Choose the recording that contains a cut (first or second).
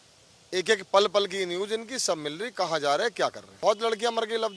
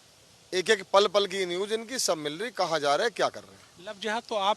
first